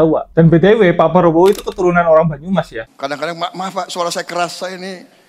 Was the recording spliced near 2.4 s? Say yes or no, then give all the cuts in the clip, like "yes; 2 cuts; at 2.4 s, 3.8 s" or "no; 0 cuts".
no; 0 cuts